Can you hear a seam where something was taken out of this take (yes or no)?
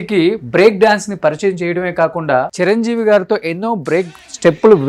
yes